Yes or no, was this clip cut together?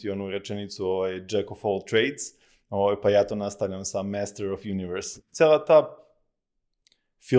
yes